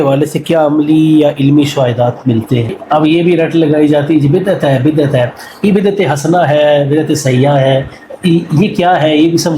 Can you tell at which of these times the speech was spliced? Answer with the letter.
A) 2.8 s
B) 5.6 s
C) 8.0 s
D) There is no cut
A